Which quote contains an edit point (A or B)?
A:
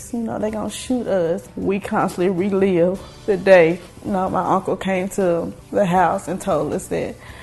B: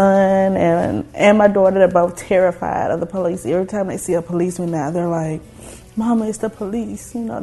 A